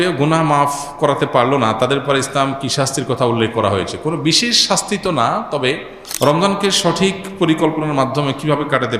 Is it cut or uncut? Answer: cut